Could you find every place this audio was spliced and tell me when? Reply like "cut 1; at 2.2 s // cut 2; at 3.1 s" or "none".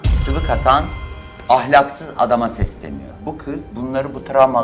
cut 1; at 3.1 s